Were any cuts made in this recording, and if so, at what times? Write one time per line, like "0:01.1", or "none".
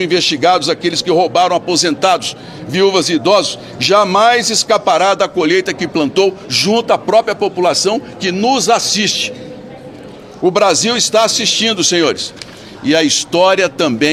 none